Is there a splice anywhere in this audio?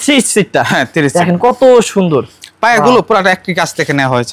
no; 0 cuts

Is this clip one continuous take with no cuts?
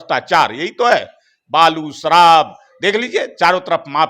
yes; 0 cuts

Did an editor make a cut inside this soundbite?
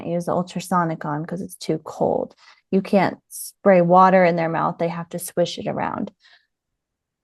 no; 0 cuts

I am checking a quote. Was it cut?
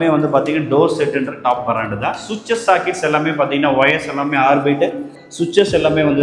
no; 0 cuts

